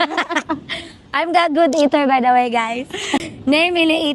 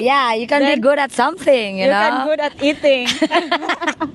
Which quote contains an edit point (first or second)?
first